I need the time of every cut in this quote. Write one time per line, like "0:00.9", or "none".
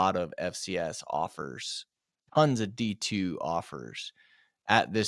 none